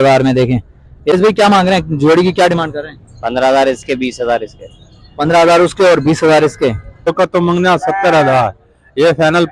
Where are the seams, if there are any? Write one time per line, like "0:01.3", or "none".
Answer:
0:01.1
0:07.1